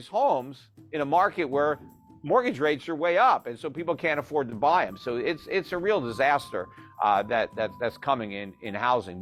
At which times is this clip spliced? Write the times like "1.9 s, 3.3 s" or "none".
none

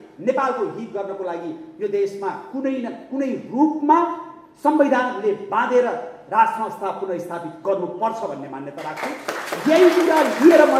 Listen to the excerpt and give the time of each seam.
none

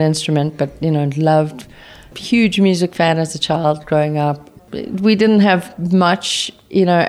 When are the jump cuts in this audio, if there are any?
2.1 s, 4.5 s

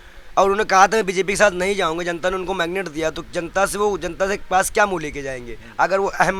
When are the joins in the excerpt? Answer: none

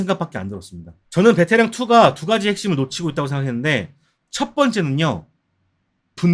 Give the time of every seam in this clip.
1.0 s

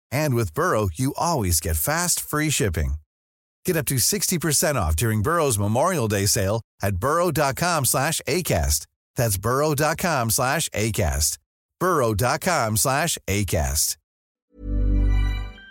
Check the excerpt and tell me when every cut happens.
14.2 s

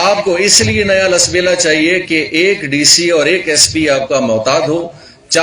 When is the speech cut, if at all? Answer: none

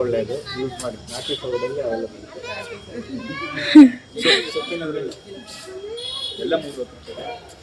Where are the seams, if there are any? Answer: none

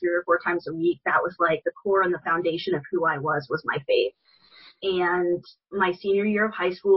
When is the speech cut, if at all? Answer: none

